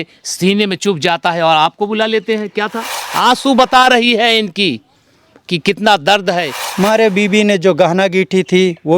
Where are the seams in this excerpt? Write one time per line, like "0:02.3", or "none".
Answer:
0:02.9
0:06.6